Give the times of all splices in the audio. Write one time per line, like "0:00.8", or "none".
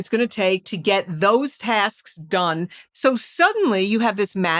0:02.7